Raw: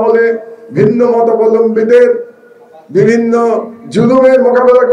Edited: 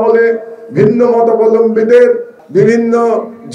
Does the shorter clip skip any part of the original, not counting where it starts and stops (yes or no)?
yes